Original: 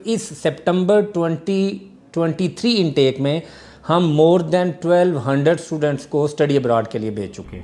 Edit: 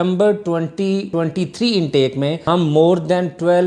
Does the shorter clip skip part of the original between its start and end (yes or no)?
yes